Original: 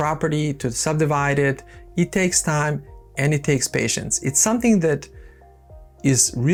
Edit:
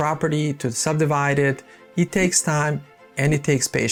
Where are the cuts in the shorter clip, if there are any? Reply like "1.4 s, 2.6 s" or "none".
none